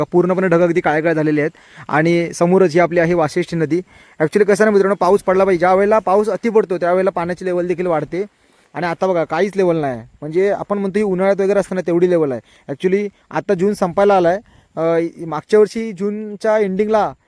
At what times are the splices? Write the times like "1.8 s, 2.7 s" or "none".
none